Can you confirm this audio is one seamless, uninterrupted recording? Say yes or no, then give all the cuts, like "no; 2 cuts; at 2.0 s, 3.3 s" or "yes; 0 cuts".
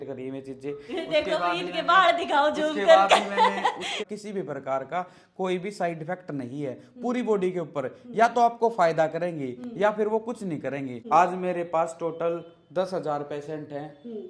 no; 2 cuts; at 4.0 s, 10.9 s